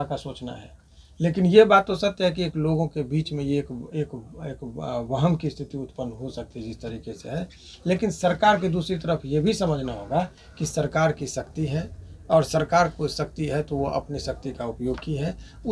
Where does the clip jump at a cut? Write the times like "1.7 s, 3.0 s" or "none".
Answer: none